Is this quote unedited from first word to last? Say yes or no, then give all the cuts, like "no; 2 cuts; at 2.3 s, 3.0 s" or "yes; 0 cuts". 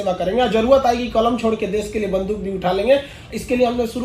yes; 0 cuts